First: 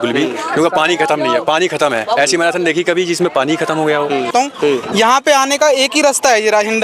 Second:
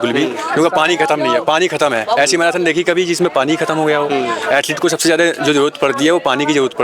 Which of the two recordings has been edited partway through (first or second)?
first